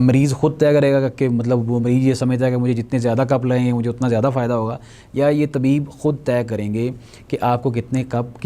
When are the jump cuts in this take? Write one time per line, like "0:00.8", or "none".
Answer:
none